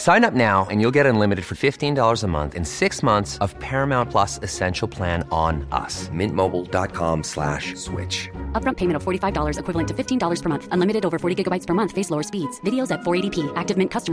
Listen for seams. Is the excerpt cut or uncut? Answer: uncut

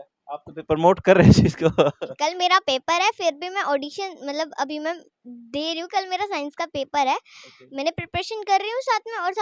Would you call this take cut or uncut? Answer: cut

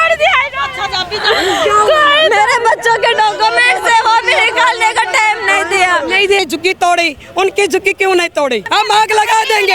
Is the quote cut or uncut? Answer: cut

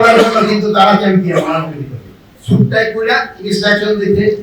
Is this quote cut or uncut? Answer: cut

